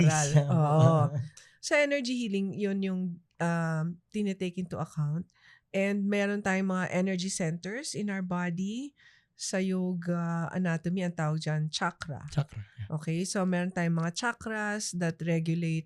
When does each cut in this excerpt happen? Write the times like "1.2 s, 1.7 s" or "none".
1.4 s